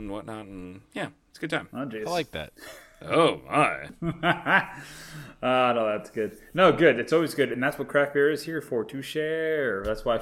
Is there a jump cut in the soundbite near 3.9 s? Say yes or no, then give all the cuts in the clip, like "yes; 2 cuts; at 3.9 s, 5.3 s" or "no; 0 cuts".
yes; 1 cut; at 3.9 s